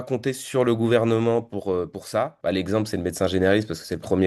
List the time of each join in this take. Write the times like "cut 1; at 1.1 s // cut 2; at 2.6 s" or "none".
cut 1; at 2.3 s